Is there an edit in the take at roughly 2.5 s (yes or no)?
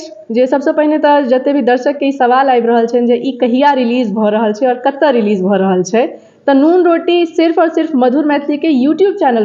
no